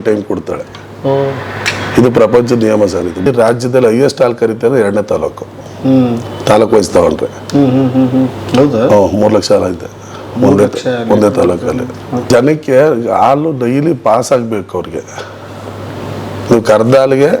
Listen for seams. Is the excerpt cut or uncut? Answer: cut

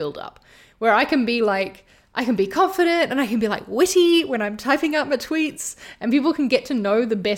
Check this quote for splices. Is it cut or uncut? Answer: uncut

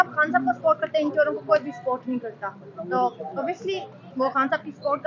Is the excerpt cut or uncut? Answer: uncut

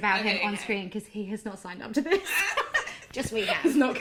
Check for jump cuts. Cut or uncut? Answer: uncut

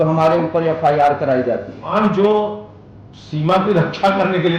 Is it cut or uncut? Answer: cut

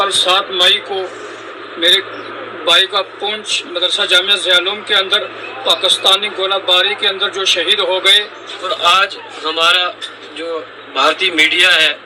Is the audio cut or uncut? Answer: cut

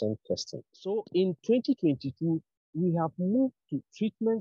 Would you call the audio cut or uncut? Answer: cut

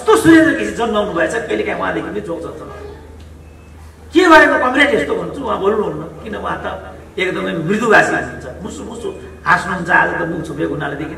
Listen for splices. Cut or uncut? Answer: uncut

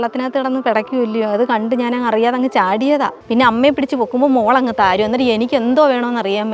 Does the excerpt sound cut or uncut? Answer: cut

